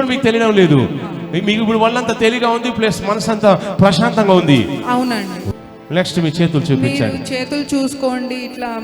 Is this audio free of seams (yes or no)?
no